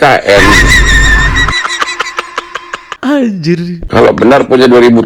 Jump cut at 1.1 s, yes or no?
no